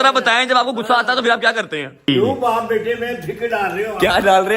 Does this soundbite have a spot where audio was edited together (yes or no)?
yes